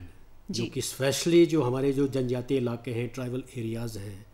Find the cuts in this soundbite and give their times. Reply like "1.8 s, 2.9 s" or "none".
none